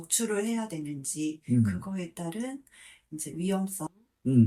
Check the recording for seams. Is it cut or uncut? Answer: uncut